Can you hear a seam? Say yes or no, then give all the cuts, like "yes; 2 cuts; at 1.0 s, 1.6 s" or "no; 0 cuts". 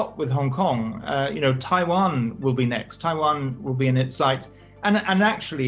no; 0 cuts